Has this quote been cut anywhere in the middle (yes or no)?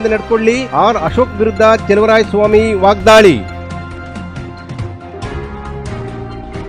no